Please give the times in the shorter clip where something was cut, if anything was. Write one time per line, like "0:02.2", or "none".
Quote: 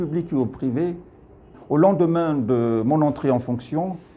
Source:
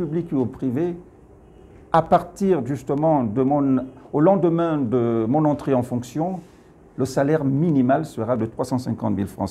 0:01.5